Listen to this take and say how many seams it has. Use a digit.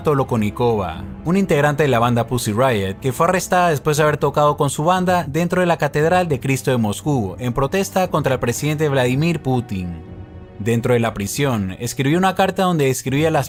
0